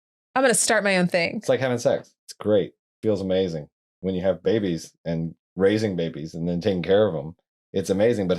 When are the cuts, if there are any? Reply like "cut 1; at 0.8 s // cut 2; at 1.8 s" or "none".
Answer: cut 1; at 3.8 s